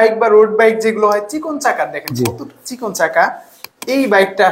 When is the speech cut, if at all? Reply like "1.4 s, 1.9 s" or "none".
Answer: none